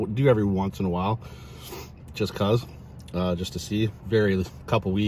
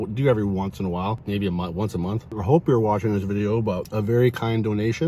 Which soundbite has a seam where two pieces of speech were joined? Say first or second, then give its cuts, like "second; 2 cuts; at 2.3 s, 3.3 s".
second; 3 cuts; at 1.2 s, 2.3 s, 3.9 s